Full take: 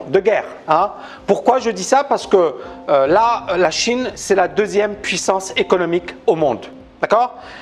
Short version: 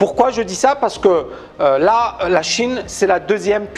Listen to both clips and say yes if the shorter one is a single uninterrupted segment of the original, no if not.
yes